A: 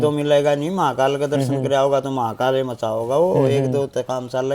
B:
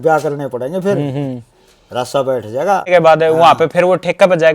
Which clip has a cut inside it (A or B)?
B